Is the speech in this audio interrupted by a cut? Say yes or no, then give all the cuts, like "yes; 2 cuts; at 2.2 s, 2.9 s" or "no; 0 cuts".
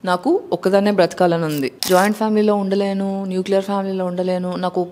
yes; 1 cut; at 1.7 s